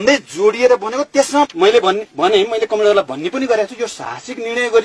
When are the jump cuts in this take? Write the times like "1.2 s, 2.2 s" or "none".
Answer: 1.5 s